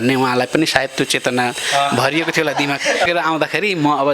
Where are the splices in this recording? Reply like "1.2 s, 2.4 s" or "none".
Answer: 3.1 s